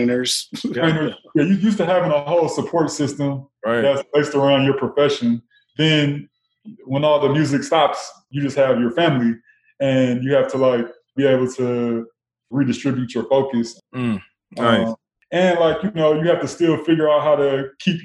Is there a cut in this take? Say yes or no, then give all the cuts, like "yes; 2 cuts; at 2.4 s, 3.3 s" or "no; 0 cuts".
yes; 6 cuts; at 5.6 s, 8.3 s, 11.1 s, 12.5 s, 13.8 s, 15.1 s